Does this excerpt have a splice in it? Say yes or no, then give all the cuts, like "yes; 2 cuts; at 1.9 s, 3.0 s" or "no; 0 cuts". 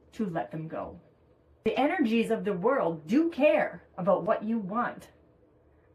yes; 1 cut; at 1.8 s